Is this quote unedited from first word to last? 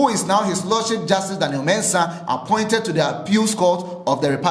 yes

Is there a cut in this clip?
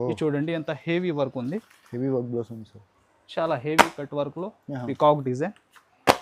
no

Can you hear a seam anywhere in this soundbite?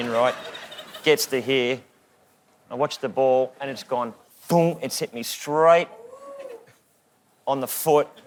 no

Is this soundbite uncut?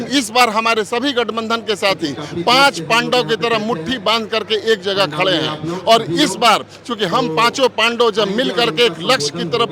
yes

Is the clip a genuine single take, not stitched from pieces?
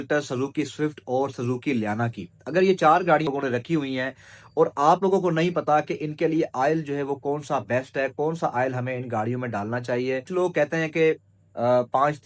no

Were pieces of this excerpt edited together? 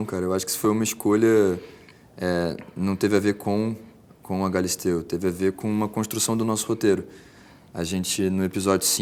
no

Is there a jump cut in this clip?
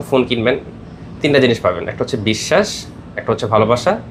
no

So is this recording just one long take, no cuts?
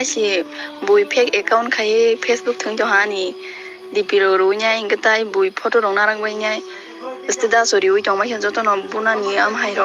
yes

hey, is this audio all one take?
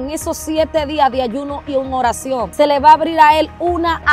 no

